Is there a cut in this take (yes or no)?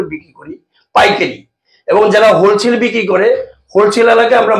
no